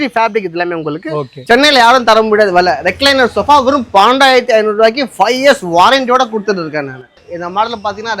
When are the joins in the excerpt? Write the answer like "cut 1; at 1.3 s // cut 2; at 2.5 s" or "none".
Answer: cut 1; at 1.4 s // cut 2; at 7.1 s